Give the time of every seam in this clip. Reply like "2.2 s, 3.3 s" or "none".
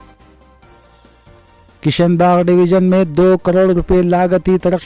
none

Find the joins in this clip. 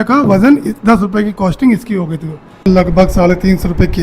2.7 s

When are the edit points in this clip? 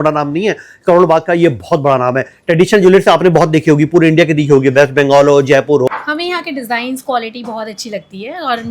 5.9 s

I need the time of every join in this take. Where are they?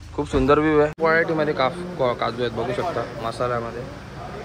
0.9 s

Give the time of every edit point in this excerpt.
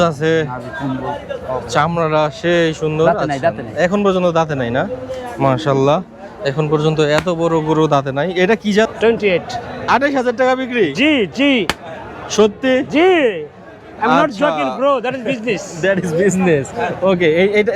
8.9 s

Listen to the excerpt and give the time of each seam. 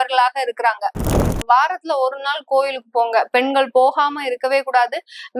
1.3 s

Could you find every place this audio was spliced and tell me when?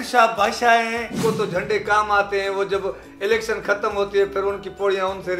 1.1 s

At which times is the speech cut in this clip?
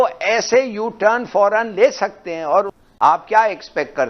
2.8 s

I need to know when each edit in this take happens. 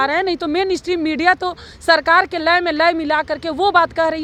none

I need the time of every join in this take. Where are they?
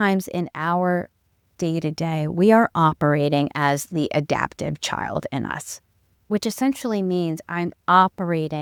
none

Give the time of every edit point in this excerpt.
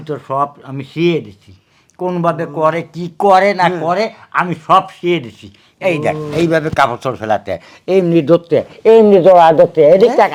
none

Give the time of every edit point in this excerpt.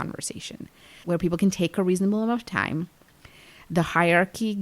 0.9 s

